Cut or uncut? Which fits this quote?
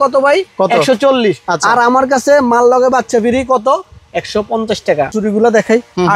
cut